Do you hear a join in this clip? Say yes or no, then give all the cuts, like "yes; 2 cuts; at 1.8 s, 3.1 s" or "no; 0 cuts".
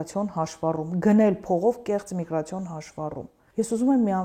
yes; 1 cut; at 3.3 s